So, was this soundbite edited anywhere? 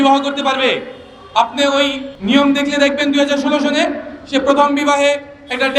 yes; 1 cut; at 2.1 s

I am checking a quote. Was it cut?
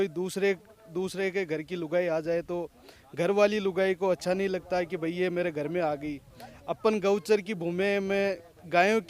no; 0 cuts

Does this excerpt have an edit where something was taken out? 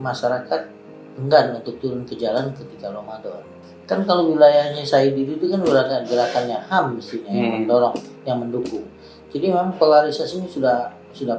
yes; 1 cut; at 3.7 s

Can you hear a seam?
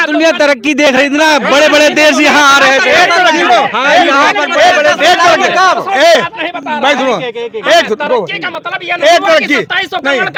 no; 0 cuts

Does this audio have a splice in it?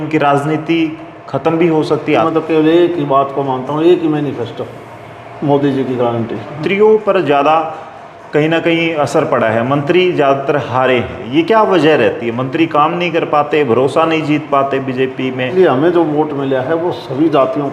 yes; 3 cuts; at 2.3 s, 6.6 s, 15.5 s

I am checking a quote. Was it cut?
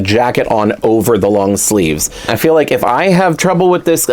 yes; 1 cut; at 2.2 s

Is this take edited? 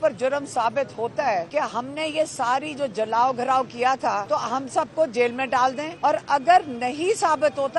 yes; 3 cuts; at 1.5 s, 4.2 s, 5.9 s

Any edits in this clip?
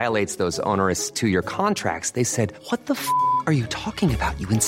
no; 0 cuts

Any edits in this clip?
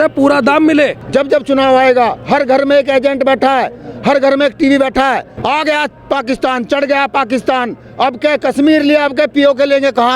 yes; 2 cuts; at 1.0 s, 5.3 s

